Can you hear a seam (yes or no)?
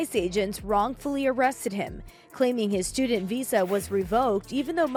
no